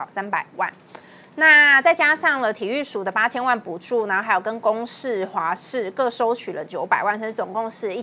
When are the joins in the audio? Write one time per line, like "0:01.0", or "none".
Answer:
none